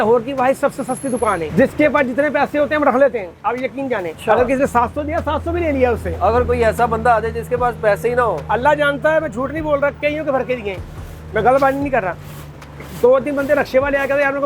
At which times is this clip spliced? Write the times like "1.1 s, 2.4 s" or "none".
1.5 s, 4.1 s